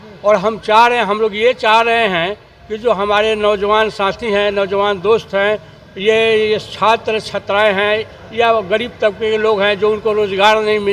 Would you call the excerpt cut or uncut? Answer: uncut